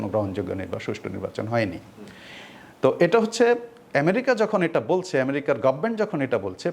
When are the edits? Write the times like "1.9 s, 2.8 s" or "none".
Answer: none